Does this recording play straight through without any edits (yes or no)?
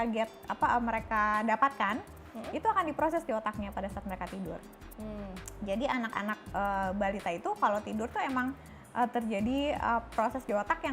yes